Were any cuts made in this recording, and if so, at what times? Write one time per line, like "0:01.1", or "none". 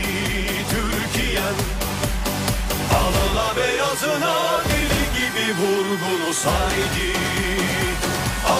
none